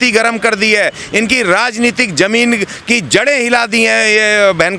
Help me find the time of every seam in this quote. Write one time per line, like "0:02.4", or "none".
none